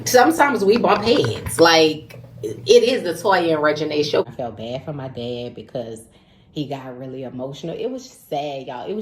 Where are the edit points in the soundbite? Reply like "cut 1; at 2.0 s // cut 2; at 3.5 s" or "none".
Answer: cut 1; at 4.3 s